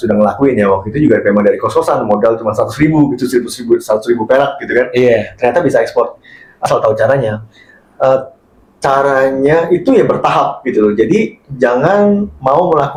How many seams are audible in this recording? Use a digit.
0